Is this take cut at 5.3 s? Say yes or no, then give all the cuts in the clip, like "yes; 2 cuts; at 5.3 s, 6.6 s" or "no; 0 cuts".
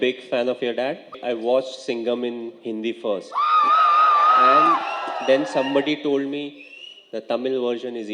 no; 1 cut; at 1.1 s